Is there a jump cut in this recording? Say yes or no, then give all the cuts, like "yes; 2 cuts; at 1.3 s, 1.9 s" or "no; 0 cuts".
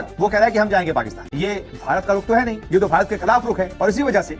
yes; 1 cut; at 1.2 s